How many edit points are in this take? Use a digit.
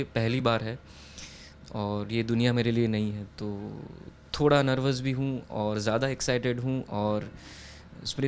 0